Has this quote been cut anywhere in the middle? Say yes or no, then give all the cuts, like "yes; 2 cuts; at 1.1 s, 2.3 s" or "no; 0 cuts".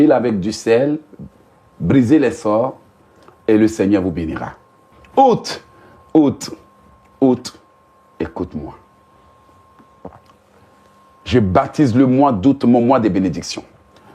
yes; 1 cut; at 5.0 s